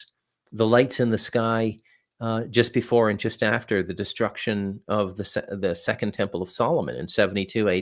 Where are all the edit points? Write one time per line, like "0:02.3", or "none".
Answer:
none